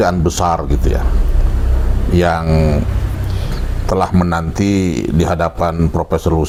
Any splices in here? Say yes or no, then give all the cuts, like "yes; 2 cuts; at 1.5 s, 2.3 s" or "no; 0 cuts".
no; 0 cuts